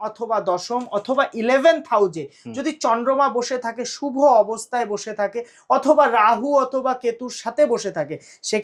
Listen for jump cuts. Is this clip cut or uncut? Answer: uncut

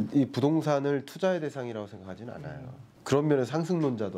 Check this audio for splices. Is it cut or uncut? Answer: cut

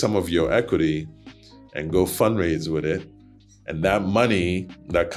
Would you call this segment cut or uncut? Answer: uncut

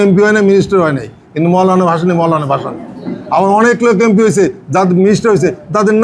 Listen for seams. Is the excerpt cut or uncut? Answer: uncut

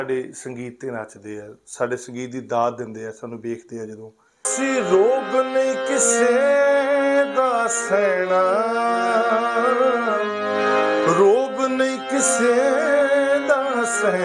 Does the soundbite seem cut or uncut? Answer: cut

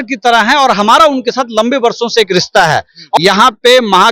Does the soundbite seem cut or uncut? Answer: cut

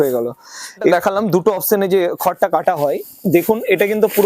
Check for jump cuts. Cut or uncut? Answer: cut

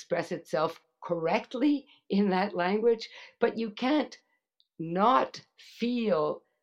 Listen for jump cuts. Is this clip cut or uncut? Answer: uncut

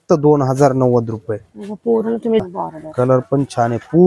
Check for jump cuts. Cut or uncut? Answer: cut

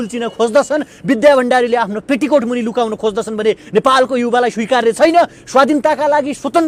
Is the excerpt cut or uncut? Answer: uncut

